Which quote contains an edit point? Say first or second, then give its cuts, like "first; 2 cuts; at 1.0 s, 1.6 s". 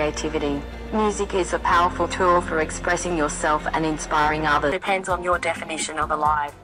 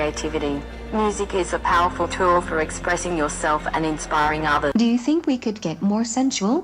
second; 1 cut; at 4.7 s